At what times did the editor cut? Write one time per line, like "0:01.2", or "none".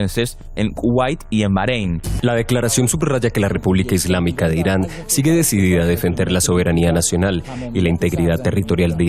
none